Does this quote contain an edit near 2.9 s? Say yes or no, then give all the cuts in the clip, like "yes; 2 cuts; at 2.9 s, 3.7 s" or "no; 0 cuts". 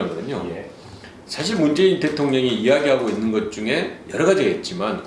yes; 1 cut; at 2.9 s